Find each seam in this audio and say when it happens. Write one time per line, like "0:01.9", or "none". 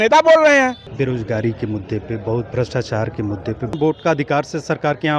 0:00.9
0:03.8